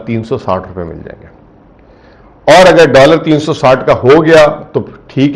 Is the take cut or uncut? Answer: uncut